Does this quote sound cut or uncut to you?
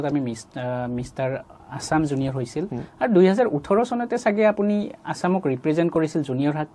uncut